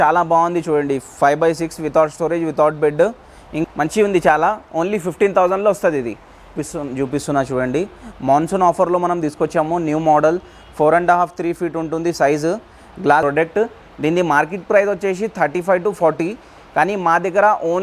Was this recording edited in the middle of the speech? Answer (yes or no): yes